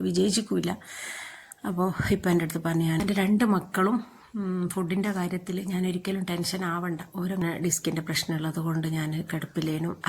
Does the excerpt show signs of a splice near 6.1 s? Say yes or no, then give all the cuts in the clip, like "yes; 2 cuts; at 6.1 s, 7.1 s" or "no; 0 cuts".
no; 2 cuts; at 3.0 s, 7.4 s